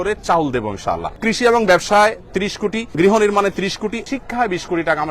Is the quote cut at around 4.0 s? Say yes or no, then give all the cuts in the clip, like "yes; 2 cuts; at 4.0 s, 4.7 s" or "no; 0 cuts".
yes; 3 cuts; at 1.2 s, 2.9 s, 4.0 s